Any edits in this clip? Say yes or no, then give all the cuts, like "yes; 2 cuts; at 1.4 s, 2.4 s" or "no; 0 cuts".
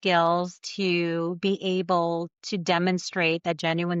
no; 0 cuts